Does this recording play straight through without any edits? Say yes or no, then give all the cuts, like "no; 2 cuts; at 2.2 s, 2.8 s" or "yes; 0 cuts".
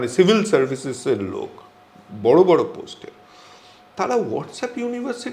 yes; 0 cuts